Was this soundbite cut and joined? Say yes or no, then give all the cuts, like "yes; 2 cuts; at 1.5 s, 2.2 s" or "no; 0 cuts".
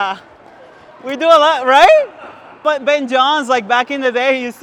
no; 0 cuts